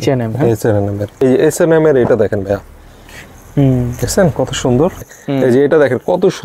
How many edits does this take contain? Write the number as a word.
two